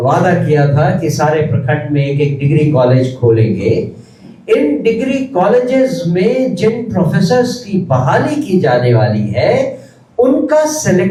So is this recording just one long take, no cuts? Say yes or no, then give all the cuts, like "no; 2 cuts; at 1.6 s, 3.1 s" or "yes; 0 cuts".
yes; 0 cuts